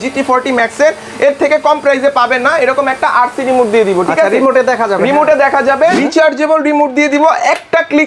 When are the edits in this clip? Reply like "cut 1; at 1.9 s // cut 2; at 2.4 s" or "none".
cut 1; at 6.0 s